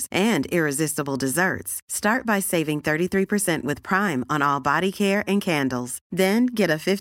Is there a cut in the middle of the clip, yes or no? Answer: no